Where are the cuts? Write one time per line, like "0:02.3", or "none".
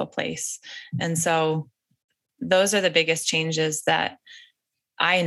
none